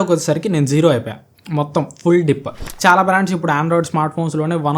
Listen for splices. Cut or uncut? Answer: cut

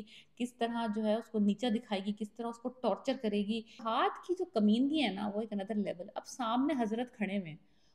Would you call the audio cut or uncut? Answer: cut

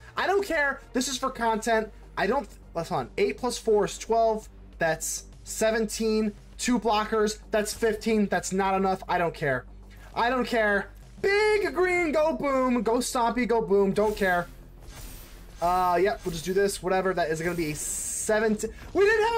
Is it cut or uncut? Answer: uncut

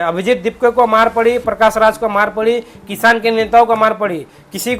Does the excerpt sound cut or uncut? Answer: uncut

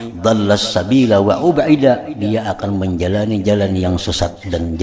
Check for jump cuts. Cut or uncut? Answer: uncut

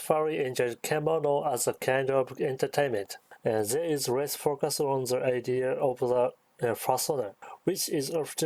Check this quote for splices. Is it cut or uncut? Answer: uncut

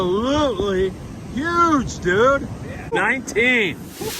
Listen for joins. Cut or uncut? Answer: cut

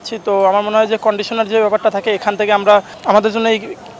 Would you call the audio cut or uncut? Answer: cut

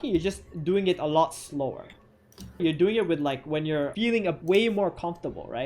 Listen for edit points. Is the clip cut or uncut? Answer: cut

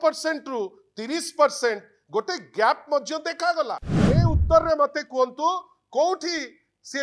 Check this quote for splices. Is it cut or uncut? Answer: cut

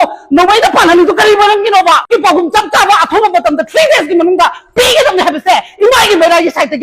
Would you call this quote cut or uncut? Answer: cut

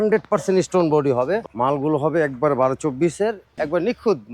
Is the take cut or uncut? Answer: cut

